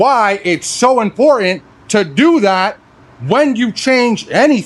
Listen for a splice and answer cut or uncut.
uncut